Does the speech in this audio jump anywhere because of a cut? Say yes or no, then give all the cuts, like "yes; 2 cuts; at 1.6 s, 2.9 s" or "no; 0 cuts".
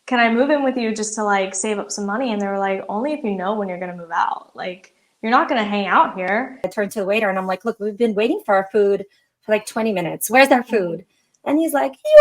yes; 1 cut; at 6.7 s